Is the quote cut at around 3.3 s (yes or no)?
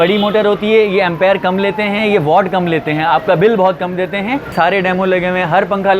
no